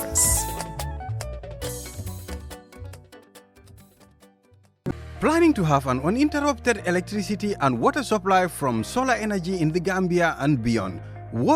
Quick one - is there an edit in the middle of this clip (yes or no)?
yes